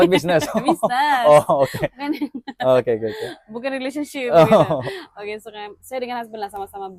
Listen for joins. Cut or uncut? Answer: uncut